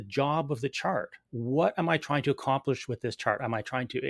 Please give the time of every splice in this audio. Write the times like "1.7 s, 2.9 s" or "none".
1.3 s